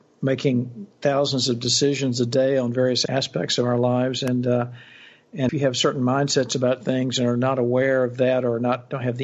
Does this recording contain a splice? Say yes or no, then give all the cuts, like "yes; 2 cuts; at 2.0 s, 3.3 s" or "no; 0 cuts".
yes; 2 cuts; at 3.0 s, 5.5 s